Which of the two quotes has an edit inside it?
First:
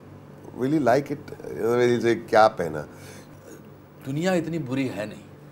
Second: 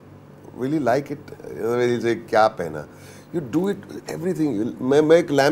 first; 1 cut; at 3.2 s

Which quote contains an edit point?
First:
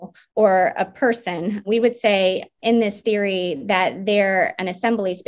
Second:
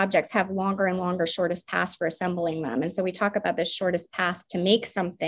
first; 2 cuts; at 1.6 s, 2.5 s

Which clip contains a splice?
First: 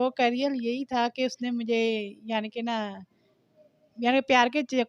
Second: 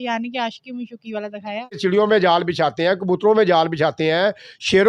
second; 1 cut; at 1.8 s

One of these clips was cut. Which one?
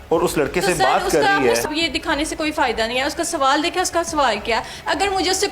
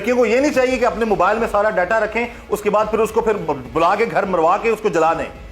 first; 1 cut; at 1.6 s

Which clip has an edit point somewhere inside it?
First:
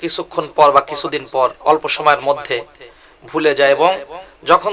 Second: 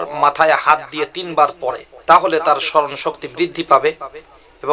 second; 1 cut; at 1.9 s

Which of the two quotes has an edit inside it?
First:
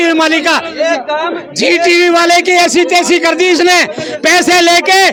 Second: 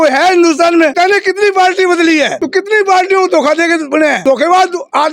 second; 3 cuts; at 0.9 s, 2.4 s, 4.2 s

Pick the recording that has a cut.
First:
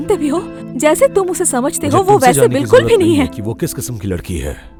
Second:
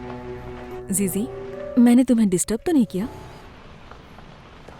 second; 2 cuts; at 1.5 s, 3.3 s

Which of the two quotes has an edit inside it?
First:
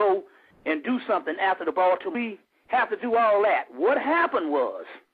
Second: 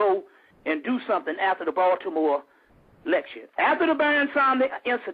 second; 1 cut; at 2.1 s

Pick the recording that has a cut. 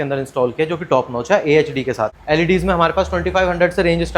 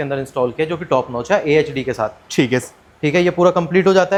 first; 1 cut; at 2.2 s

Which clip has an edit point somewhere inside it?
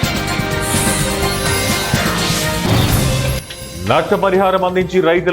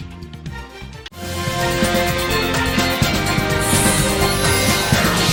first; 1 cut; at 3.4 s

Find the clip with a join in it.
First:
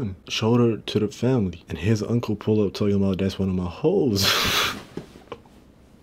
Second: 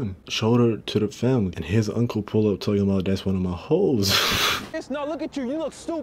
second; 2 cuts; at 1.6 s, 4.7 s

